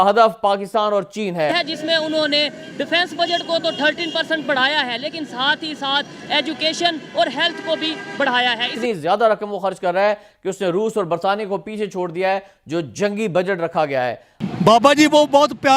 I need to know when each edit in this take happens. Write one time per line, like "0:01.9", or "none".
0:01.5
0:08.7
0:14.3